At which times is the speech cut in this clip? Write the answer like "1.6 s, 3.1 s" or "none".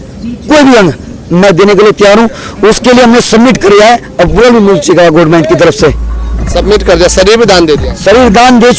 none